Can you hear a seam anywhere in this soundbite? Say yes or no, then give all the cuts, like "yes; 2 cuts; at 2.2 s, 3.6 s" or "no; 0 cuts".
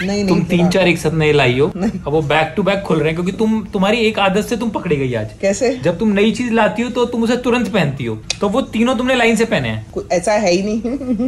yes; 1 cut; at 8.2 s